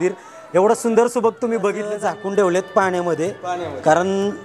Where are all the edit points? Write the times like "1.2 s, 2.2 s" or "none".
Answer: 1.9 s